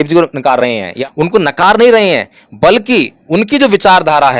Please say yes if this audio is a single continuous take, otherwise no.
no